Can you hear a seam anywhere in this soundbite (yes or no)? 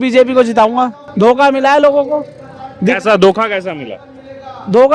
yes